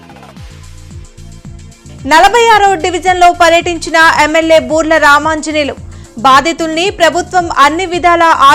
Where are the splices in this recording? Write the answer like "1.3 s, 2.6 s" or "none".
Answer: 1.6 s